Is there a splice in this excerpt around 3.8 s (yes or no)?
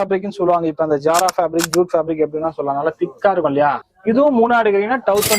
yes